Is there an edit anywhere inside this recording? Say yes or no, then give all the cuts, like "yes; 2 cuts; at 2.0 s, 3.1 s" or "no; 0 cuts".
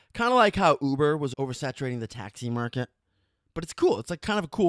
yes; 1 cut; at 1.3 s